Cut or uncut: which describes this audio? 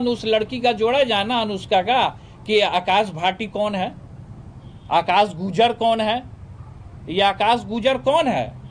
uncut